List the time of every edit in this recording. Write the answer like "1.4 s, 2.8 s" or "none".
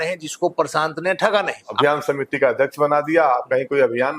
1.7 s